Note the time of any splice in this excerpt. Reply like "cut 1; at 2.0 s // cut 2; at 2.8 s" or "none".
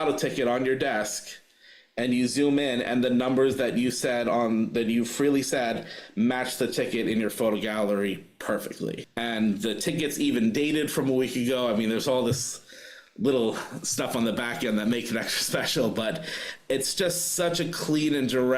cut 1; at 9.1 s